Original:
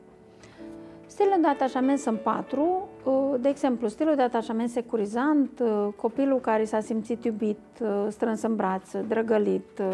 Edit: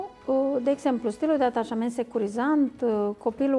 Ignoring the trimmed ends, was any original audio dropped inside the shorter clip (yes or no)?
no